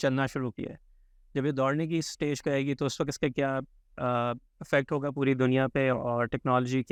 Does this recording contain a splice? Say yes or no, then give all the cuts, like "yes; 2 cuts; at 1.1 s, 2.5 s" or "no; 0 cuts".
no; 0 cuts